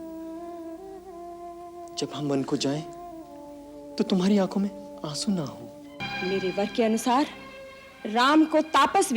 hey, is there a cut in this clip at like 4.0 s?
no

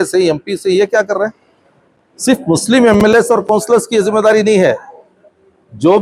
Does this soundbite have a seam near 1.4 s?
no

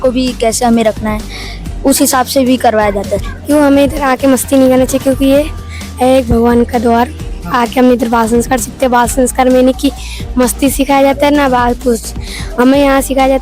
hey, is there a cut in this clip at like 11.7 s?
no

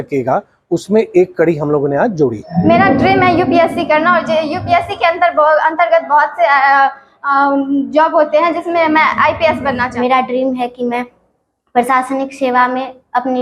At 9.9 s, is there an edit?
yes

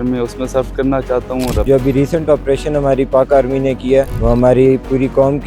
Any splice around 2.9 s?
no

